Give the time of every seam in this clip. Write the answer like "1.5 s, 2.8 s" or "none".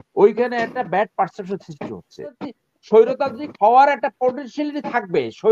2.4 s